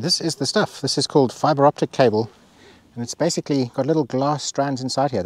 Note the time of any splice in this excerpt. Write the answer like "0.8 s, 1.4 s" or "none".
none